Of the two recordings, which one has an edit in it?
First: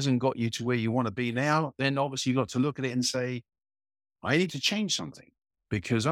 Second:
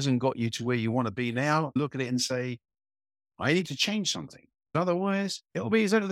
second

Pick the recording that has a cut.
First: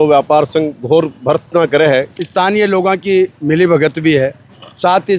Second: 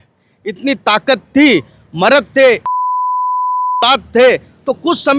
first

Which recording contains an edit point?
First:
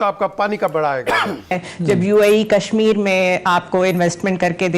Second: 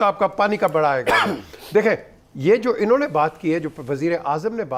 first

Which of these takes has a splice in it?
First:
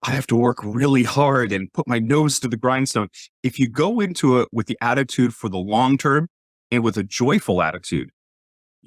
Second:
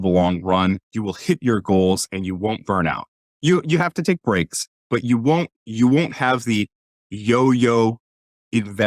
second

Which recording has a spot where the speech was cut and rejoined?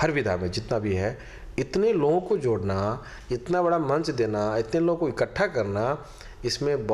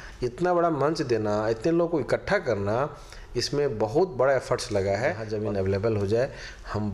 second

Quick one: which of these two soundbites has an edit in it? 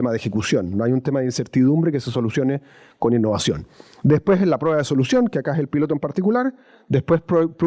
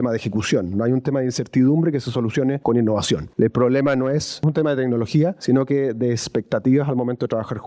second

